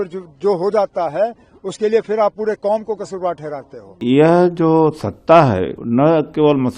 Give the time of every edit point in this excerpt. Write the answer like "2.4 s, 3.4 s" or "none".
4.0 s, 5.8 s